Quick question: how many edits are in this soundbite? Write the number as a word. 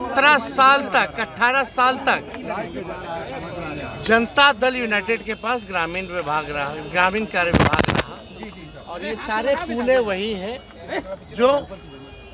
zero